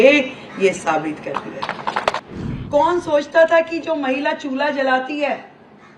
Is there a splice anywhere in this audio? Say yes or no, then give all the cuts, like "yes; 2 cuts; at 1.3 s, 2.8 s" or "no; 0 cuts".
yes; 1 cut; at 2.2 s